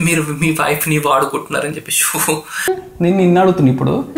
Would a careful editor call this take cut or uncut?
cut